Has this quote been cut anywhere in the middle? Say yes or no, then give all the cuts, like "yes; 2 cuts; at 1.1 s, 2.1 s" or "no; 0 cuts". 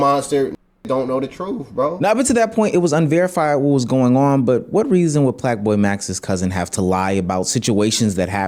no; 0 cuts